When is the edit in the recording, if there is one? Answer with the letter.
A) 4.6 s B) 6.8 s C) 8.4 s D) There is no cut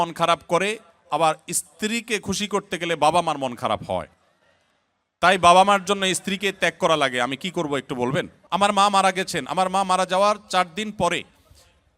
C